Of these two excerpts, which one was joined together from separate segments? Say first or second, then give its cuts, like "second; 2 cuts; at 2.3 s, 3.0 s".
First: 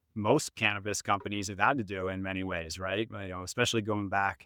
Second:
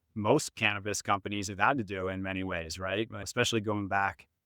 second; 1 cut; at 3.2 s